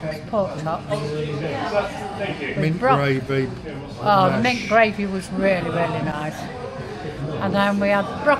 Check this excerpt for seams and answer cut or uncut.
uncut